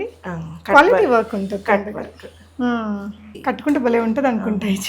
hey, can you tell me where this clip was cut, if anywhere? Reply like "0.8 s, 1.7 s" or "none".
3.2 s